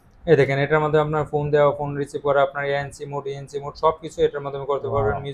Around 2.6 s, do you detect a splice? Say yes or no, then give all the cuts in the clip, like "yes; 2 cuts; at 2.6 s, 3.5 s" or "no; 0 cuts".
no; 0 cuts